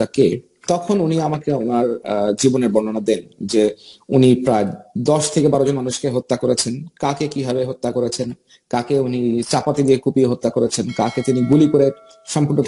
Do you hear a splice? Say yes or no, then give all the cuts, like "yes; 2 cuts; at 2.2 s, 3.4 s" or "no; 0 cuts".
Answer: no; 0 cuts